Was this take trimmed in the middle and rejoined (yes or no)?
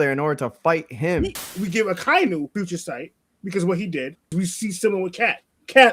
yes